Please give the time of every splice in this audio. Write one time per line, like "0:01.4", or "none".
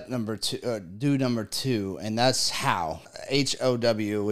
0:03.0